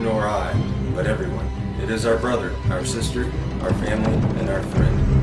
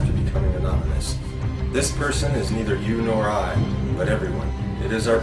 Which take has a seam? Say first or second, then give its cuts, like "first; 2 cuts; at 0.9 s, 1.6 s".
first; 1 cut; at 3.6 s